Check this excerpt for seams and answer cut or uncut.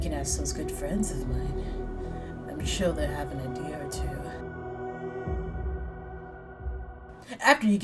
uncut